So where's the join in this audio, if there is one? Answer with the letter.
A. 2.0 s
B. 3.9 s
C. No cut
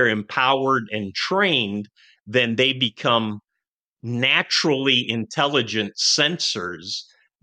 C